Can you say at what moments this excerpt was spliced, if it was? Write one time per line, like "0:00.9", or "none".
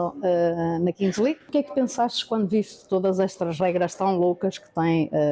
0:01.4